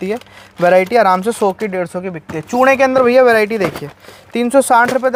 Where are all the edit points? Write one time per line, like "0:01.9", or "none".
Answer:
none